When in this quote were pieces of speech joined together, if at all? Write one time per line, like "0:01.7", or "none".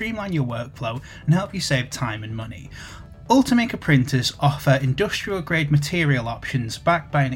none